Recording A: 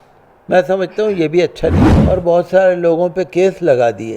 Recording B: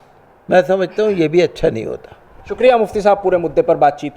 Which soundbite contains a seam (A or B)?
A